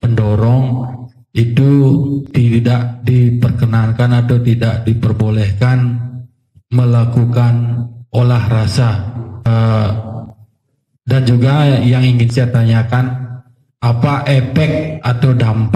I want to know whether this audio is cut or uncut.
cut